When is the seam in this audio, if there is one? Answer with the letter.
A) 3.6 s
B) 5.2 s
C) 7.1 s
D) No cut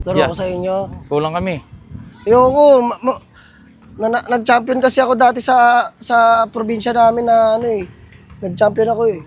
D